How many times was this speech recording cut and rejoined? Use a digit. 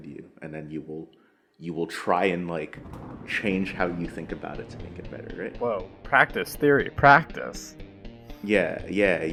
0